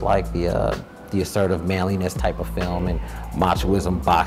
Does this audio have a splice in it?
no; 0 cuts

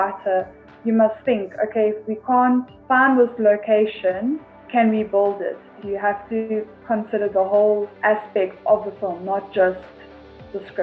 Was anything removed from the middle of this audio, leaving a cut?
yes; 4 cuts; at 2.7 s, 4.5 s, 5.7 s, 7.9 s

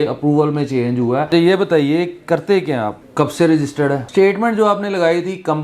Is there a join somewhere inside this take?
yes; 3 cuts; at 1.3 s, 3.0 s, 4.0 s

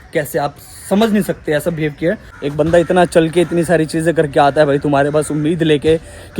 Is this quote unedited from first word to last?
no; 1 cut; at 2.3 s

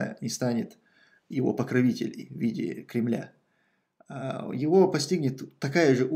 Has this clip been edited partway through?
no; 0 cuts

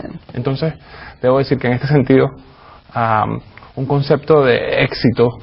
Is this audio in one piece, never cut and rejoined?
yes; 0 cuts

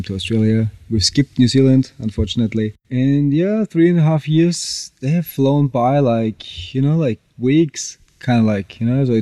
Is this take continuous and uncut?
yes; 0 cuts

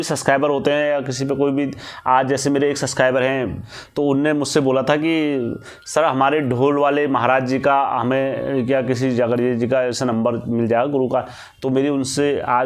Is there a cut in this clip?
no; 0 cuts

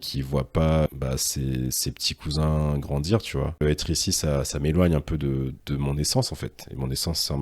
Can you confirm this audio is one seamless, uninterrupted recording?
no; 2 cuts; at 0.9 s, 3.6 s

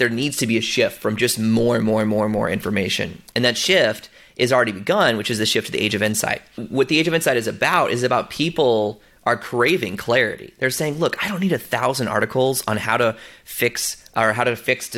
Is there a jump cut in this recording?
yes; 1 cut; at 6.6 s

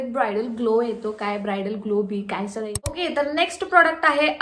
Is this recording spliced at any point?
yes; 1 cut; at 2.8 s

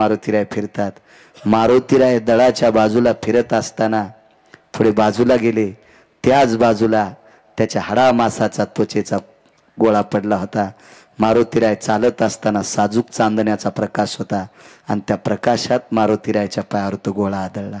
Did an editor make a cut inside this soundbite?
no; 0 cuts

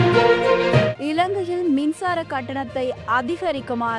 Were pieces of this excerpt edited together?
yes; 1 cut; at 0.9 s

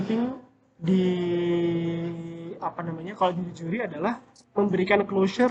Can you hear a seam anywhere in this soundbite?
no; 0 cuts

